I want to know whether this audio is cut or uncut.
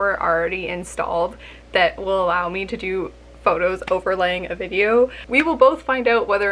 cut